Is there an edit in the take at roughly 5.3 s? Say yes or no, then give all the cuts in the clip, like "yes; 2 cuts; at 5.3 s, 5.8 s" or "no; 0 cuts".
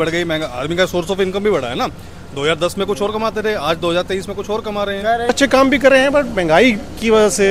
yes; 1 cut; at 5.3 s